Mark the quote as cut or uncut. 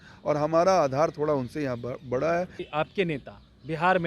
cut